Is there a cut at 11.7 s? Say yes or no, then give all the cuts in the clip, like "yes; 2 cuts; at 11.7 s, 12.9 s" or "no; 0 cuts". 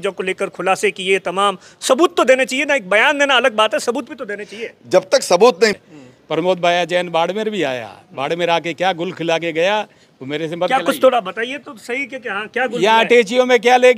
no; 1 cut; at 5.8 s